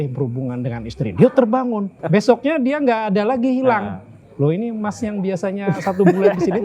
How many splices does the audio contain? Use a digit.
1